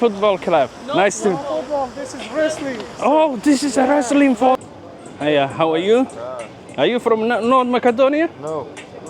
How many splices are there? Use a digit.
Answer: 1